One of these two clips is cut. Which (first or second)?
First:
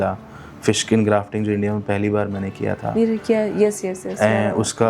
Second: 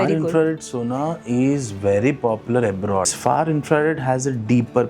second